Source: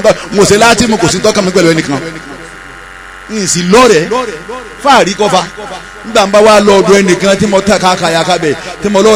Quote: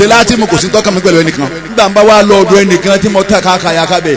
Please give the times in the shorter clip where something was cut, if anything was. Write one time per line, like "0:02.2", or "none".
0:01.5